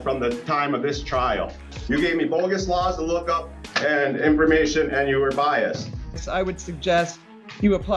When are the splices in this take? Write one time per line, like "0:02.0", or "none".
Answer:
0:01.5
0:06.2